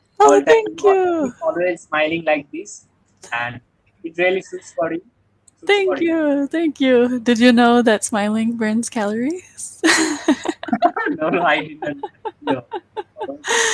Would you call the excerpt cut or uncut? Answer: uncut